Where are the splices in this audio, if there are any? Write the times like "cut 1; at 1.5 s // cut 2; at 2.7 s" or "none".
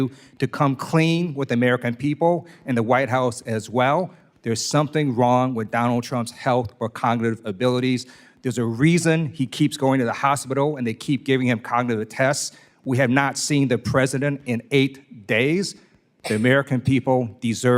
none